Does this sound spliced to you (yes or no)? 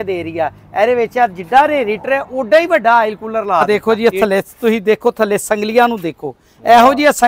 yes